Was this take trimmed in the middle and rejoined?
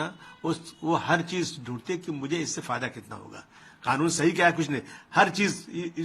no; 0 cuts

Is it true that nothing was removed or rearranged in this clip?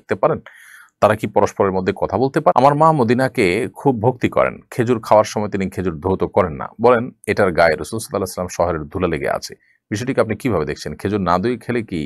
no; 1 cut; at 2.5 s

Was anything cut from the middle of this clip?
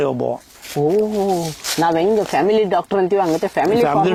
no; 0 cuts

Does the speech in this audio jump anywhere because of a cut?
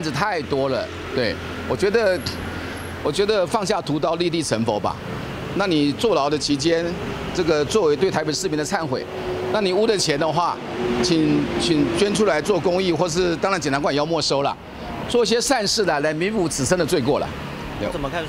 no; 0 cuts

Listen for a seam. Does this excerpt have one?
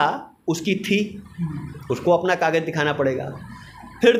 no; 0 cuts

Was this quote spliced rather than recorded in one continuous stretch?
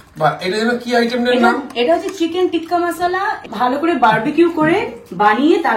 no; 0 cuts

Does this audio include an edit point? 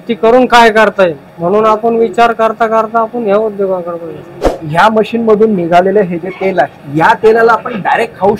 yes; 3 cuts; at 1.3 s, 4.6 s, 6.8 s

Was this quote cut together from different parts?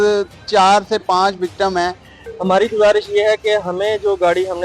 yes; 1 cut; at 2.2 s

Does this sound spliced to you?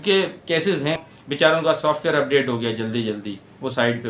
yes; 1 cut; at 1.0 s

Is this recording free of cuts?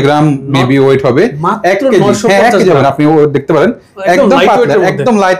yes; 0 cuts

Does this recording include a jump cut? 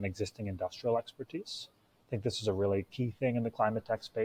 no; 0 cuts

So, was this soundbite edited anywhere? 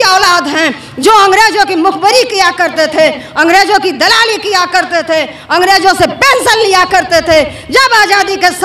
no; 0 cuts

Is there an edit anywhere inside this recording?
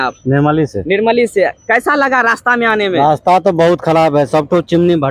no; 0 cuts

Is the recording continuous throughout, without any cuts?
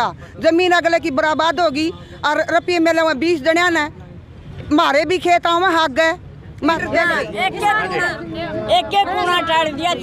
no; 1 cut; at 6.7 s

